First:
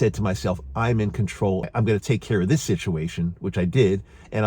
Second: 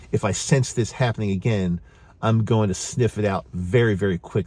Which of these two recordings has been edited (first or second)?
first